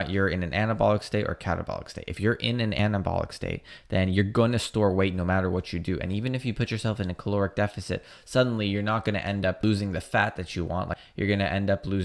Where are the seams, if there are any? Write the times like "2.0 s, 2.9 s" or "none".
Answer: 2.8 s, 9.6 s, 11.0 s